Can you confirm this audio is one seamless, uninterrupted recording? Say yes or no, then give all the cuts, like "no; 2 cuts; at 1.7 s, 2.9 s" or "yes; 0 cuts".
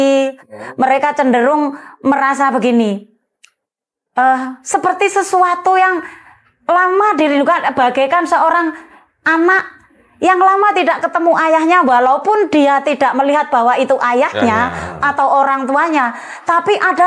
yes; 0 cuts